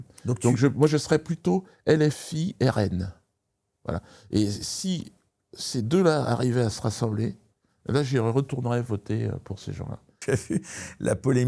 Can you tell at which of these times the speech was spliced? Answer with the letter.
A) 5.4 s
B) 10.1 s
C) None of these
B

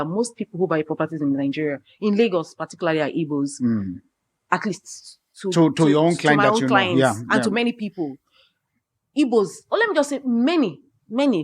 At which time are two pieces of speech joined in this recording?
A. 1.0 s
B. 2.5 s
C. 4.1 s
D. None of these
D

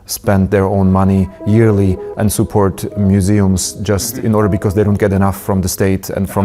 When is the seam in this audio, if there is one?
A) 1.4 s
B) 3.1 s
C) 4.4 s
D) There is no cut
D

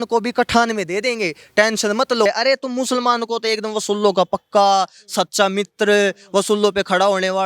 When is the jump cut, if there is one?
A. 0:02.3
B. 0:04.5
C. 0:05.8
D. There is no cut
A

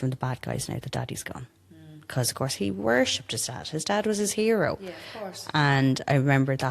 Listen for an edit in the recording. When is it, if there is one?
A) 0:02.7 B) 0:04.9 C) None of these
C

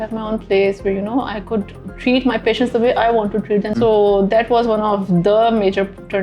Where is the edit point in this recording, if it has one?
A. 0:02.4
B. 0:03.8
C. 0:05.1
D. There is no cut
B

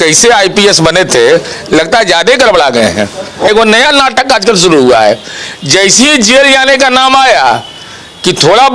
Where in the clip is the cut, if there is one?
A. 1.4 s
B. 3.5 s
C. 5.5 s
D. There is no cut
B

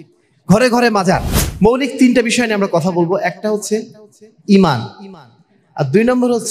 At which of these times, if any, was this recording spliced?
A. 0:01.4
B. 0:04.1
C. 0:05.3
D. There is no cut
A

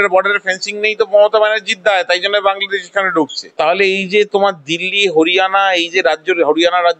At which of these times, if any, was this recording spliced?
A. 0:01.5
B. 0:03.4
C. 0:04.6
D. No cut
B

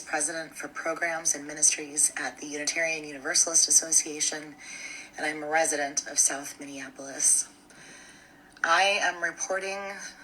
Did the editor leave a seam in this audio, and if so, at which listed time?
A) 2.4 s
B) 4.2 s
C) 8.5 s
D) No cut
A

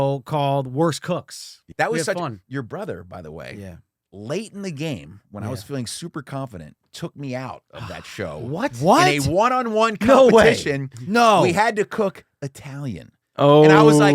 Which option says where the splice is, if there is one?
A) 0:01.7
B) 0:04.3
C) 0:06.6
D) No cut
A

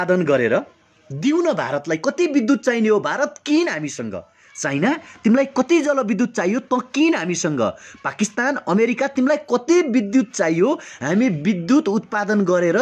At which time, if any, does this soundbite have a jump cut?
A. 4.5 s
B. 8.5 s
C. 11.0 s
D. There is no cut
D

